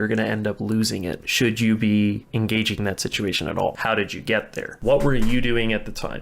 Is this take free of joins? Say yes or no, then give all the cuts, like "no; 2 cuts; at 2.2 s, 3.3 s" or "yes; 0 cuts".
no; 1 cut; at 3.8 s